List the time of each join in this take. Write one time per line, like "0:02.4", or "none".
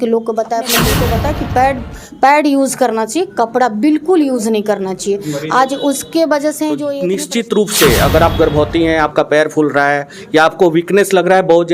0:00.9
0:06.9